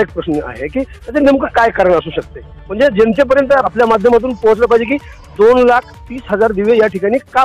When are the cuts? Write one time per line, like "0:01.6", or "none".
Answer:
0:03.7